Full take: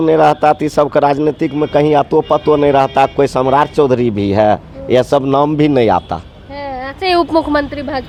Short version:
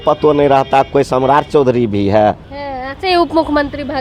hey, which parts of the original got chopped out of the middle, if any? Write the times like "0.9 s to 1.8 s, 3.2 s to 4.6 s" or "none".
4.7 s to 6.5 s